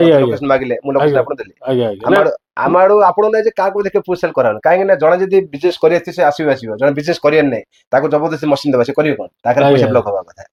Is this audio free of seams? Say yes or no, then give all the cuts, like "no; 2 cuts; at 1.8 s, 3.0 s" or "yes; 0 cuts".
yes; 0 cuts